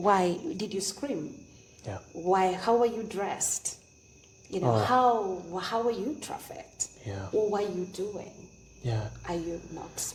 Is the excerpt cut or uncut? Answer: uncut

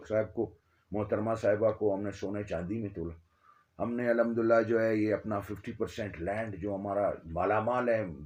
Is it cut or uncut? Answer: uncut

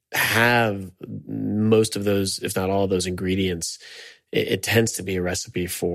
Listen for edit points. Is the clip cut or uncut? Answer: uncut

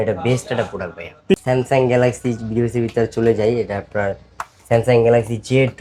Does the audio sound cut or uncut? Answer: cut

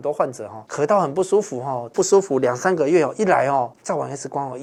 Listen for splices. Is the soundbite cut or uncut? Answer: uncut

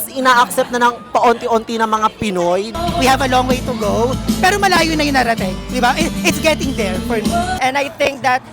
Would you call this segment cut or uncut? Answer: cut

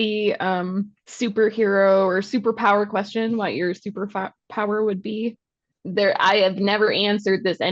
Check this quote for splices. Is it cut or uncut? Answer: cut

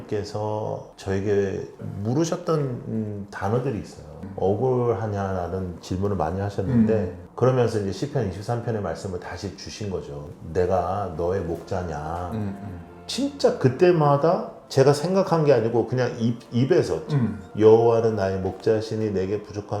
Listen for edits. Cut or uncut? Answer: cut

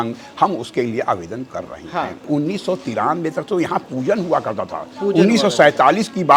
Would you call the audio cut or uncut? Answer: cut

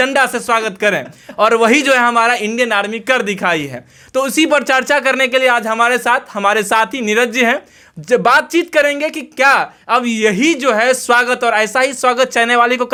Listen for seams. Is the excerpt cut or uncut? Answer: uncut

